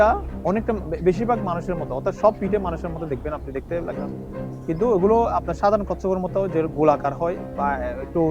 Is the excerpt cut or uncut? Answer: uncut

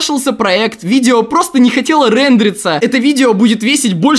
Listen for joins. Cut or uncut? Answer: cut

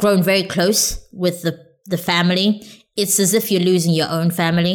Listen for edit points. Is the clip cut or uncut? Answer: uncut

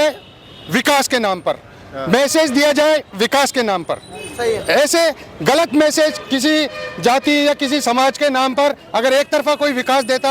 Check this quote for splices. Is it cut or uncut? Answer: uncut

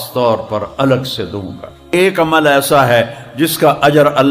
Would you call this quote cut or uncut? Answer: cut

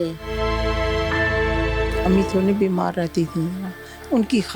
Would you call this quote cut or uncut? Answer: cut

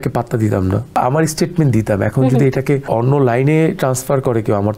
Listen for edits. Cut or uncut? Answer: cut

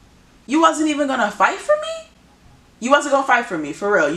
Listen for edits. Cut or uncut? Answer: uncut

